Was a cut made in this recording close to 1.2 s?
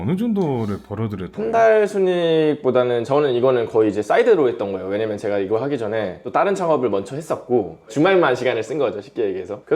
yes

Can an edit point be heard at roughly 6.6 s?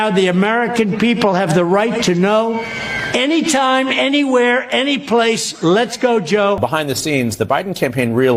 yes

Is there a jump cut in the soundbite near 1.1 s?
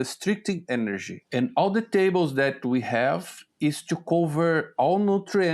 yes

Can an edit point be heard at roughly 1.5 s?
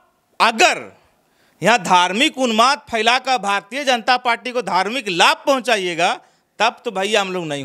no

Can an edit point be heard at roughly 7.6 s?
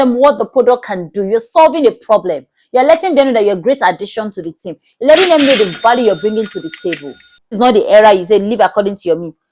yes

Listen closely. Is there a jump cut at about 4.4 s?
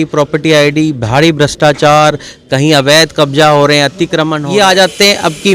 yes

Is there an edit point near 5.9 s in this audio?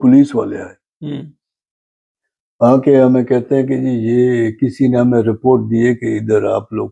no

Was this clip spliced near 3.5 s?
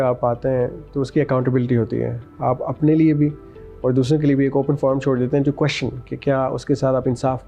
no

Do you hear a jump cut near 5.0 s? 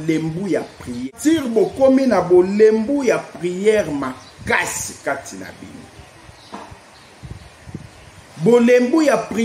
no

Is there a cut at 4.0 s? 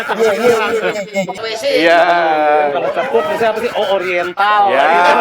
no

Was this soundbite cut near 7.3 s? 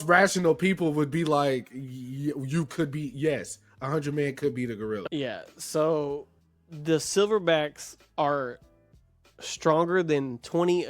no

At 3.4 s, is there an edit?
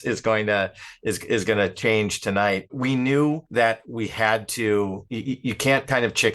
yes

